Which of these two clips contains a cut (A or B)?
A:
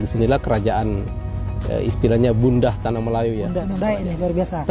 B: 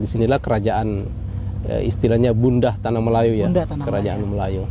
A